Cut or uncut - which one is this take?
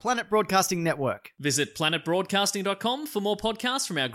uncut